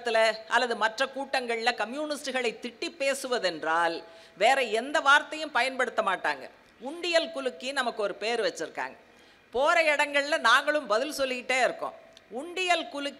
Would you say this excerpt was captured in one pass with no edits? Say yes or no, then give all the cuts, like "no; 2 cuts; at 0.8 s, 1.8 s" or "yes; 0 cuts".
yes; 0 cuts